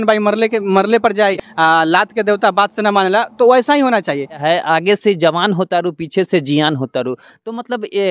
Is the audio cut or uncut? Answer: cut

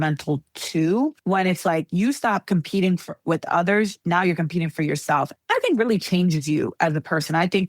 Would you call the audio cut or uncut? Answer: cut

